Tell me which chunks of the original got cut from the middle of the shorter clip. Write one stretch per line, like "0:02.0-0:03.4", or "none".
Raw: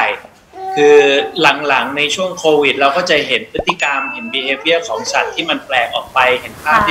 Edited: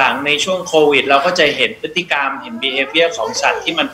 none